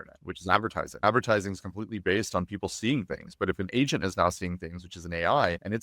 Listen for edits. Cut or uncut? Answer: cut